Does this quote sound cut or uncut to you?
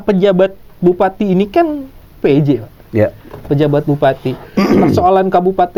uncut